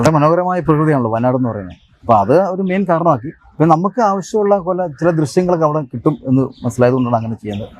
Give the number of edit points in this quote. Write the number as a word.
zero